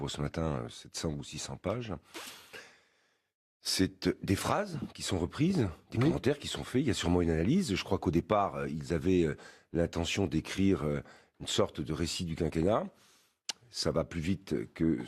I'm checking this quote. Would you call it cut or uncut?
cut